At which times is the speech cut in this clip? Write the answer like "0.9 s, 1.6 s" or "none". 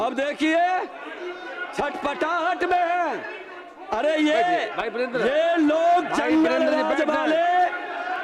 none